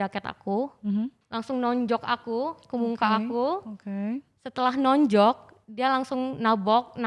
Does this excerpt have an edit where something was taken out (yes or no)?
no